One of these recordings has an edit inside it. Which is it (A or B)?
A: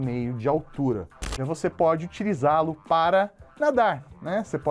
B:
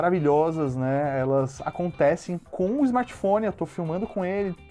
A